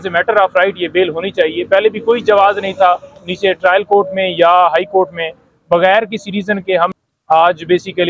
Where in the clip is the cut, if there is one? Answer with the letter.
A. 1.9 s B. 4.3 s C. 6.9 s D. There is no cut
C